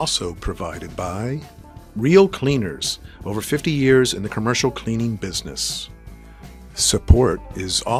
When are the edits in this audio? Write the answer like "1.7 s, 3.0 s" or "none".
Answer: none